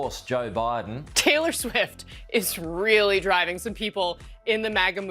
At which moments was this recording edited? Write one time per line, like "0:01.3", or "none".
0:01.1

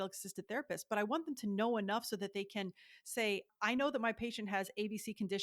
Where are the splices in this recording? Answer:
0:03.5

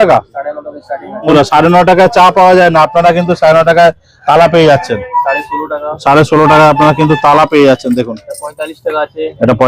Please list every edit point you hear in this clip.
0:01.3
0:05.1

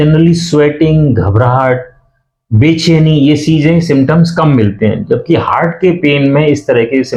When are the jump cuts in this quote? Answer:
none

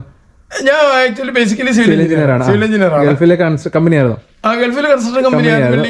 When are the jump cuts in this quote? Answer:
none

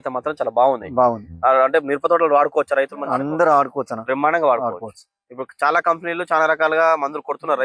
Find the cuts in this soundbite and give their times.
none

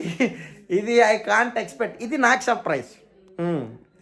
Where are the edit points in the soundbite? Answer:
none

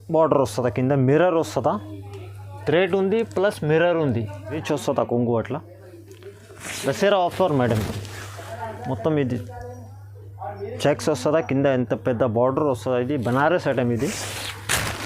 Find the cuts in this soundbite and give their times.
0:04.6

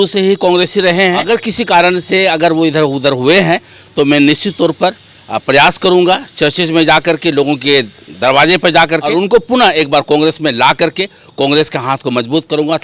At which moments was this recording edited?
0:01.2
0:09.1

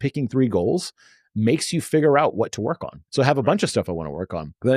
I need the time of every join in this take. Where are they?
0:03.0

